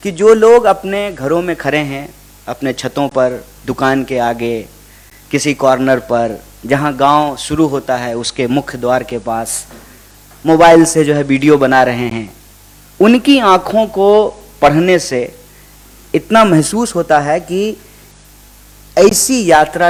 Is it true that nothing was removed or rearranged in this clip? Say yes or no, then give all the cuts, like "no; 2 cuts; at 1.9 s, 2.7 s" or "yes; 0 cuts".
yes; 0 cuts